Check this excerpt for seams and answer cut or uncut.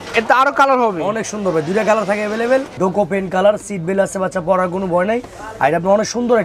cut